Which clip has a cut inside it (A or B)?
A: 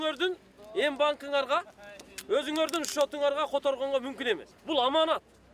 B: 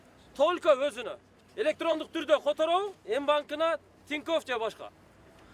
A